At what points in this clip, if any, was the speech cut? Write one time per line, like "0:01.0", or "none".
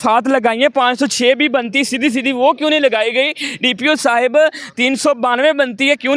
none